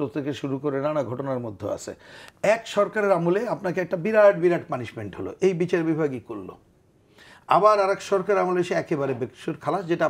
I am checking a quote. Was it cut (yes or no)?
no